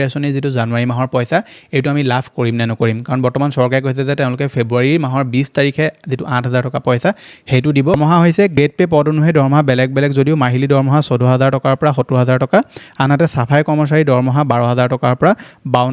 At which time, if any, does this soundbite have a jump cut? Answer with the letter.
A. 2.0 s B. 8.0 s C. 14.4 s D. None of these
B